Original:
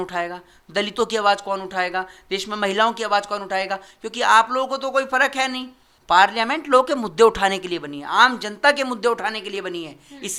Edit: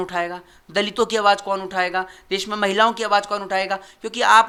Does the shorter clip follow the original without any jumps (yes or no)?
yes